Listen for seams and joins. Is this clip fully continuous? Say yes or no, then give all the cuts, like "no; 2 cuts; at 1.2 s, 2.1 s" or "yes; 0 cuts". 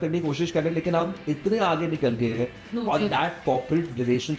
yes; 0 cuts